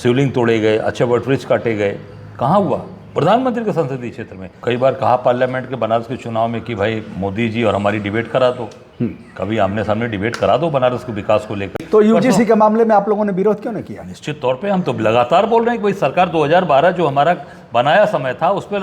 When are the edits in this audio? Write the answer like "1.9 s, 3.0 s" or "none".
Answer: 4.5 s, 11.8 s